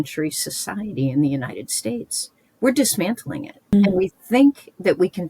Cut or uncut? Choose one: cut